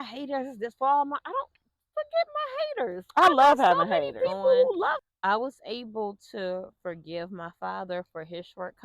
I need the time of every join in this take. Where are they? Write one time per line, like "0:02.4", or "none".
0:05.0